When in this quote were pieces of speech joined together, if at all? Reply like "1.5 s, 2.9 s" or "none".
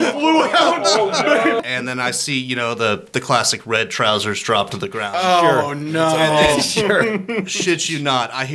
1.6 s